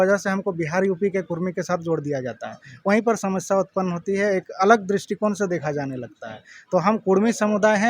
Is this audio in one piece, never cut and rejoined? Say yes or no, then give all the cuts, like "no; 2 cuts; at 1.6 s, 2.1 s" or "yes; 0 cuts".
yes; 0 cuts